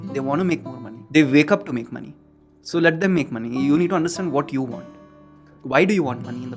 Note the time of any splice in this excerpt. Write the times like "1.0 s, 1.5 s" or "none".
1.0 s